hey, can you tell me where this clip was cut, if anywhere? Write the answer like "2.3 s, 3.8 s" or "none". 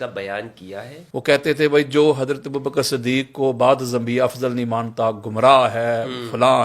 1.0 s